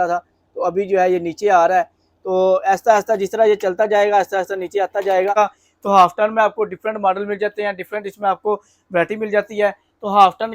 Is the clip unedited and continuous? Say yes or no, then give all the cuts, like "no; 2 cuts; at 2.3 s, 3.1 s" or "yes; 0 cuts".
no; 1 cut; at 5.3 s